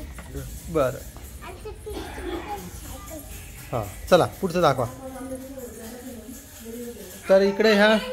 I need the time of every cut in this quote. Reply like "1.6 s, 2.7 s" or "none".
none